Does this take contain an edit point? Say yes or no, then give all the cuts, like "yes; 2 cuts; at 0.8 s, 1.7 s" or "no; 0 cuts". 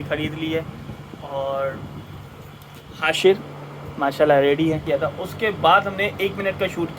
yes; 1 cut; at 4.8 s